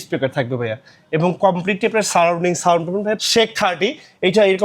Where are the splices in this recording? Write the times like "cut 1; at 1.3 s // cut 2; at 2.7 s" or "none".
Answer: cut 1; at 3.2 s